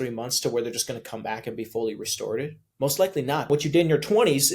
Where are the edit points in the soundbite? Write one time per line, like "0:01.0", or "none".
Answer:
0:02.6
0:03.5